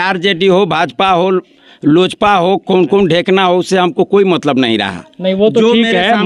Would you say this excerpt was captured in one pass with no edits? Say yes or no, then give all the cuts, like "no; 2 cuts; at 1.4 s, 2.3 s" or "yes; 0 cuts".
yes; 0 cuts